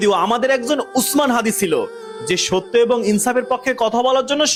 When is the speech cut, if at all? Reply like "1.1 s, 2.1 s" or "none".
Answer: none